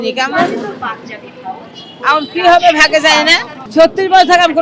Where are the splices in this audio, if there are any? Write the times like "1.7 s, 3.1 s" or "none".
3.5 s